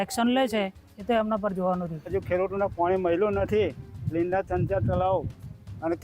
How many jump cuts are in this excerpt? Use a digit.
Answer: 1